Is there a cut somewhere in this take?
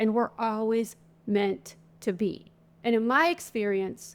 yes; 1 cut; at 2.7 s

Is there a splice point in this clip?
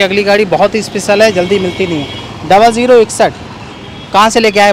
no; 0 cuts

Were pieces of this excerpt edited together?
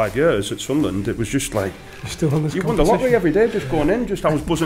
no; 0 cuts

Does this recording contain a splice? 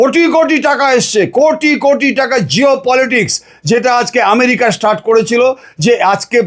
no; 0 cuts

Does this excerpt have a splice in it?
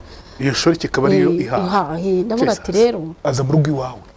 yes; 1 cut; at 3.1 s

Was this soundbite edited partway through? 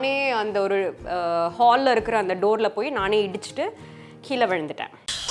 no; 0 cuts

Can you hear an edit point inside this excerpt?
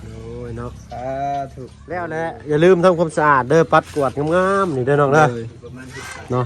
yes; 1 cut; at 2.1 s

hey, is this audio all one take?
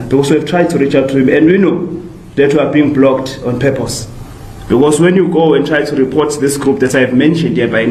yes; 0 cuts

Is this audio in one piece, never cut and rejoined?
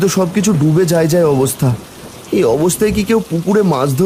yes; 0 cuts

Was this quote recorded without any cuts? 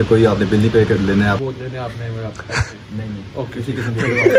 no; 1 cut; at 1.4 s

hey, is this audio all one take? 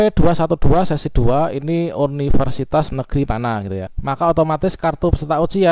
no; 1 cut; at 3.9 s

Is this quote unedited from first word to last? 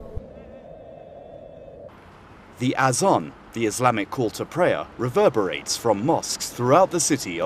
yes; 0 cuts

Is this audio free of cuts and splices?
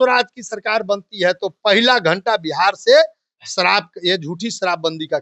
yes; 0 cuts

